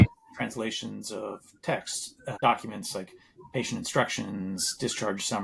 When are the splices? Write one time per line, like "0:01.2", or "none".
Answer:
0:02.4

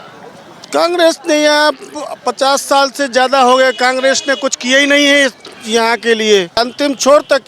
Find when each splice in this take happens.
0:06.6

